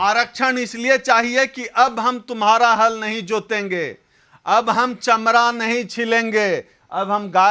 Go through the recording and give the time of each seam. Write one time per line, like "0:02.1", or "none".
none